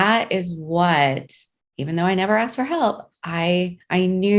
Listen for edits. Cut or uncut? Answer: uncut